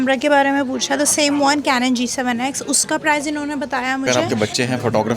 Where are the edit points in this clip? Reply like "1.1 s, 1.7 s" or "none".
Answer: 4.0 s